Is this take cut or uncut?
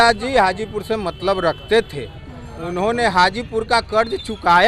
uncut